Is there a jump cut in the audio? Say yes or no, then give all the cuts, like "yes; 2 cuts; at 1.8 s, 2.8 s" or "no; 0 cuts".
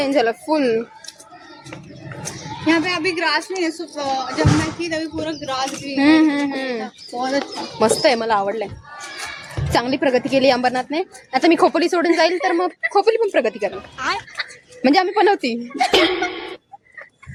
no; 0 cuts